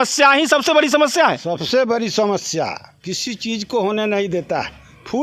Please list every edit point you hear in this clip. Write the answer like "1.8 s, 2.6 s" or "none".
none